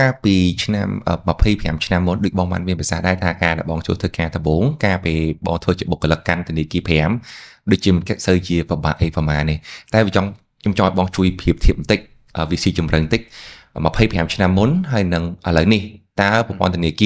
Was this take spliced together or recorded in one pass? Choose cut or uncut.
uncut